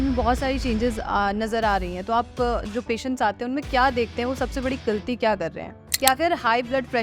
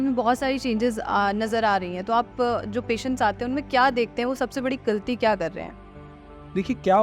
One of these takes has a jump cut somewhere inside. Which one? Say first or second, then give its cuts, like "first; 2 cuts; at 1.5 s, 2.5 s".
first; 1 cut; at 5.8 s